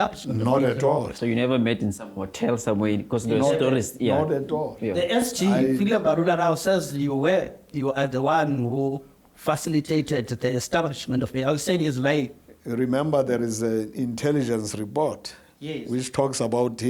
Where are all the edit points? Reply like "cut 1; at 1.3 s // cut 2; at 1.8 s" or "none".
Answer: cut 1; at 12.3 s